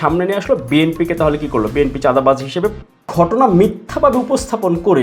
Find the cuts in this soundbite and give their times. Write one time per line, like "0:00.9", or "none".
0:03.0